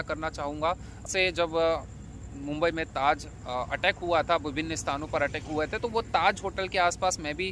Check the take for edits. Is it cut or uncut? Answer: cut